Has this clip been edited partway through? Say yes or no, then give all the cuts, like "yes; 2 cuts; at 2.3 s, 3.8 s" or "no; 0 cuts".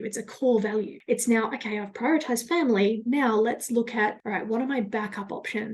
yes; 2 cuts; at 0.9 s, 4.2 s